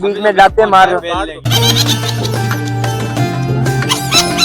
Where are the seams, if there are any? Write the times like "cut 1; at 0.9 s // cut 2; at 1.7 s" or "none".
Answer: cut 1; at 1.5 s

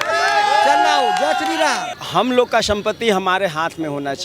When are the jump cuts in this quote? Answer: cut 1; at 1.9 s

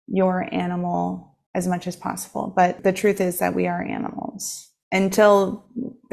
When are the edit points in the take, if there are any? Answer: cut 1; at 1.3 s // cut 2; at 2.8 s

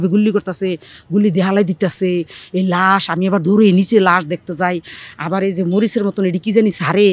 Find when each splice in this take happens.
none

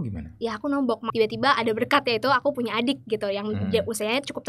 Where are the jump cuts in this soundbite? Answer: cut 1; at 1.1 s

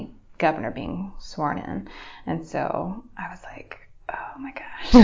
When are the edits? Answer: none

